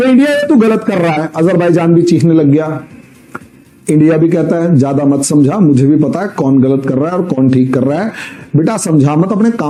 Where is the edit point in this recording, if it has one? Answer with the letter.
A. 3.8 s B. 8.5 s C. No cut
C